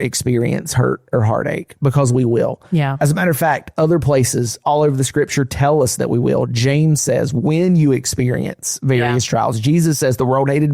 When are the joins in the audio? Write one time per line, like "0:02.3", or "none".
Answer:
none